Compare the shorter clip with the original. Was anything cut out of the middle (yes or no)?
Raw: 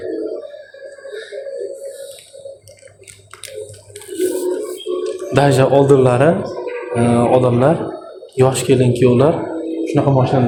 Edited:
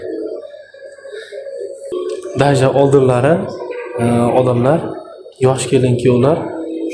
yes